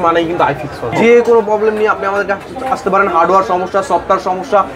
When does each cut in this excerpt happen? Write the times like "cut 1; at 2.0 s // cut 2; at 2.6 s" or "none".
cut 1; at 0.9 s